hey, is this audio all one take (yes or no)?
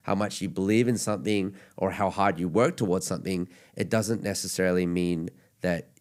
yes